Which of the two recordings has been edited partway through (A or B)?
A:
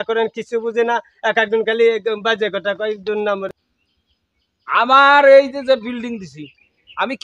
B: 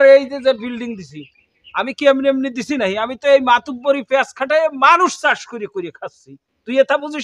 A